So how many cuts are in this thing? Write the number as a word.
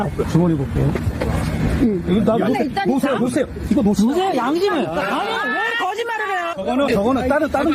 zero